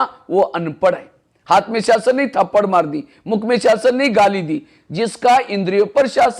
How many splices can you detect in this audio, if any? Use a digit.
0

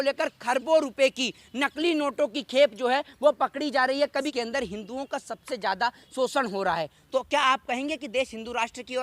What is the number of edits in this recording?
1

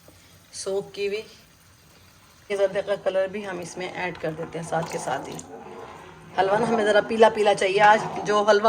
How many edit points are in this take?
1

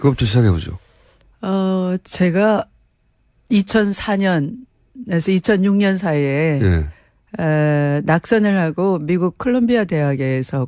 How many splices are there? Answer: 1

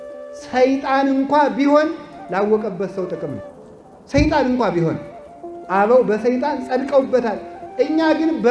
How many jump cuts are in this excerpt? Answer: 0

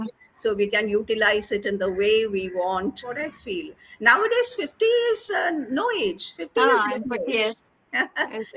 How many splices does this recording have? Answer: 1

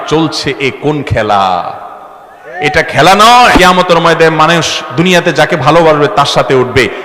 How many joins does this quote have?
1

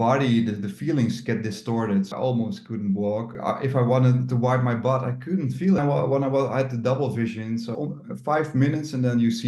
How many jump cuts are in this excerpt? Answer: 4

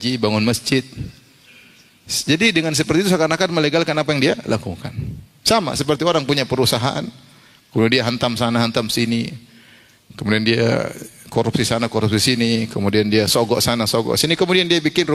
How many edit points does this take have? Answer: 0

